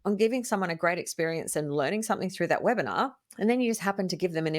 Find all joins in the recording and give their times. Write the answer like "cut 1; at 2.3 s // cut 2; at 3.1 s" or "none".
cut 1; at 3.2 s